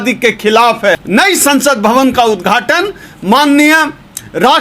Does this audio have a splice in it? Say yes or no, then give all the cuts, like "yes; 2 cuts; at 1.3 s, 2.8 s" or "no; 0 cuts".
yes; 1 cut; at 0.9 s